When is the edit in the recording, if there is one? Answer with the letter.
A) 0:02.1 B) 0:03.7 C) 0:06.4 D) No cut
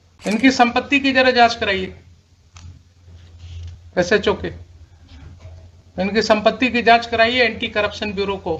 B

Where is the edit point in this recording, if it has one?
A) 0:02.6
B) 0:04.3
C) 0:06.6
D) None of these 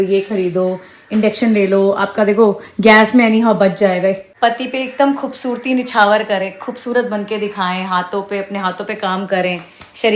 B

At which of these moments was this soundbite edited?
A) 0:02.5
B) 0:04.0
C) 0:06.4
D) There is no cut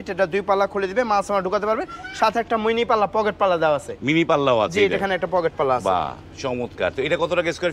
D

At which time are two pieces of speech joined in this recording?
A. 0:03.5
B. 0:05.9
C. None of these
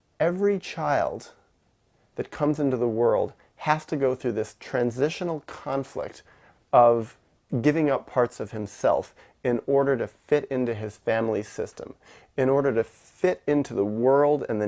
A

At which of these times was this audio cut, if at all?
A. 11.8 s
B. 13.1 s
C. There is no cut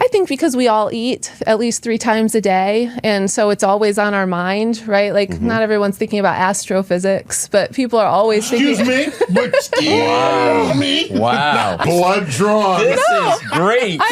A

